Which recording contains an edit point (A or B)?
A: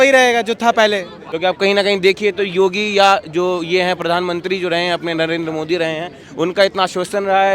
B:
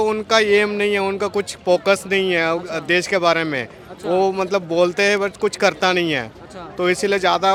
A